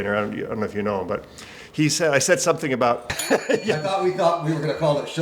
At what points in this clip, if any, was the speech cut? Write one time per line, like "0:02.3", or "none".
0:03.2